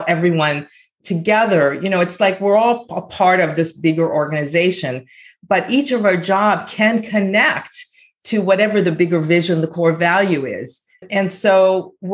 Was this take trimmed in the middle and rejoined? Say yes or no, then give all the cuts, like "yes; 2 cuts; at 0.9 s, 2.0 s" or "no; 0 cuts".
yes; 1 cut; at 11.0 s